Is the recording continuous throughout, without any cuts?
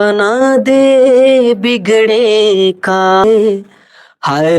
no; 1 cut; at 3.2 s

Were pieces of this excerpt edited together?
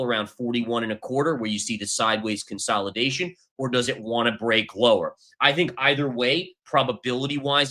no; 0 cuts

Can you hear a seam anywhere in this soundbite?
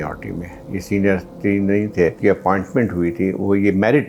yes; 1 cut; at 2.2 s

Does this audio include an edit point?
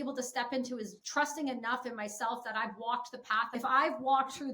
yes; 2 cuts; at 1.0 s, 3.5 s

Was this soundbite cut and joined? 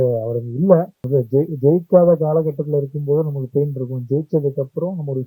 yes; 1 cut; at 1.0 s

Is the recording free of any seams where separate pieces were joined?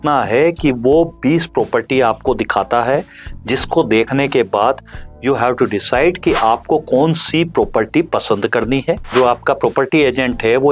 no; 1 cut; at 9.1 s

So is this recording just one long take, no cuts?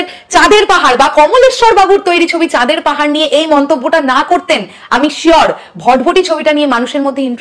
yes; 0 cuts

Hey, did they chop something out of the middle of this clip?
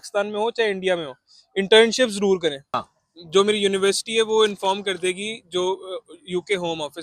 yes; 1 cut; at 2.9 s

